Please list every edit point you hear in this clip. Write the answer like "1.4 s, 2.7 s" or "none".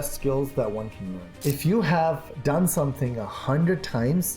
1.3 s, 2.3 s